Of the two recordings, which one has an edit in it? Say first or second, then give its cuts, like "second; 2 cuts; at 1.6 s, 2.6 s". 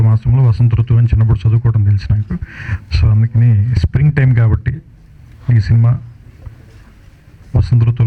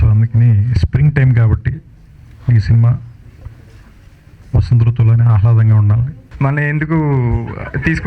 second; 1 cut; at 6.2 s